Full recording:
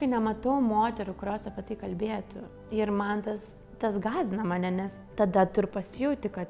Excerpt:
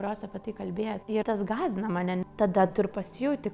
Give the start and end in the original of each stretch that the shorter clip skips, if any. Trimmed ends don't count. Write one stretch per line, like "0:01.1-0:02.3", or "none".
0:02.3-0:03.6
0:04.8-0:05.1